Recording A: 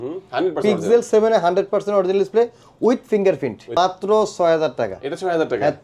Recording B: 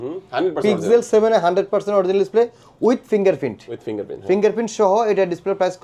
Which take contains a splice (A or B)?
A